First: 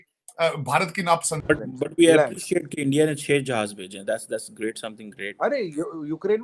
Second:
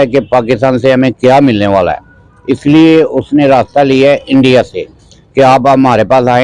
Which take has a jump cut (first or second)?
first